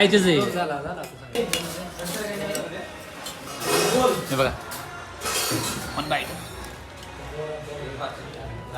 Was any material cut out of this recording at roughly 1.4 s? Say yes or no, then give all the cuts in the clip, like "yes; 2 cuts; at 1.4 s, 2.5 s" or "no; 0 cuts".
yes; 1 cut; at 1.4 s